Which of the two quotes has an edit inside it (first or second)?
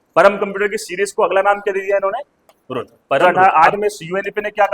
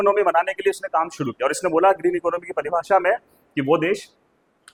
first